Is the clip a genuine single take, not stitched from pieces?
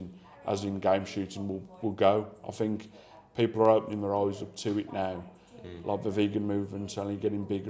yes; 0 cuts

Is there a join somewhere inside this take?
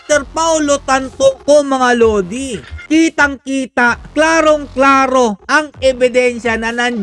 yes; 2 cuts; at 2.8 s, 4.0 s

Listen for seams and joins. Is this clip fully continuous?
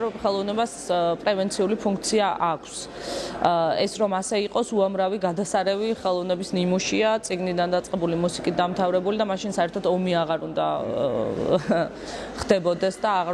yes; 0 cuts

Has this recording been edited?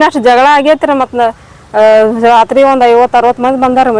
no; 0 cuts

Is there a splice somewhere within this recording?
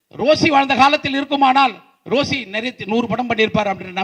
no; 0 cuts

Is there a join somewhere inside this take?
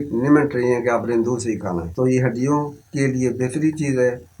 yes; 1 cut; at 1.9 s

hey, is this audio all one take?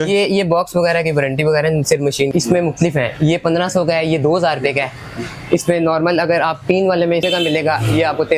no; 2 cuts; at 2.3 s, 7.2 s

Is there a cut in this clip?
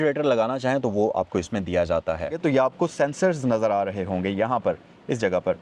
yes; 1 cut; at 2.4 s

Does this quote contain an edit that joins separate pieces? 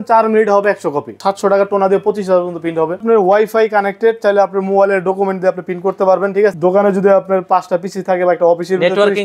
yes; 3 cuts; at 1.1 s, 3.0 s, 6.5 s

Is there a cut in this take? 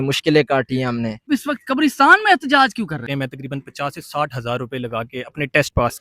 yes; 2 cuts; at 1.3 s, 3.2 s

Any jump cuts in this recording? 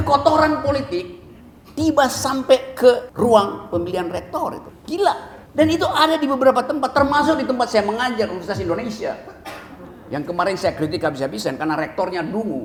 no; 0 cuts

